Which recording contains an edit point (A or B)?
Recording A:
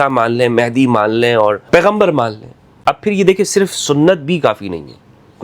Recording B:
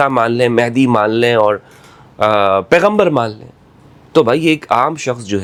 A